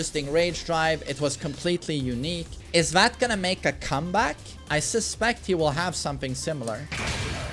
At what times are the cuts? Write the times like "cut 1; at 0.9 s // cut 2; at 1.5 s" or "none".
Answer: cut 1; at 2.5 s // cut 2; at 4.5 s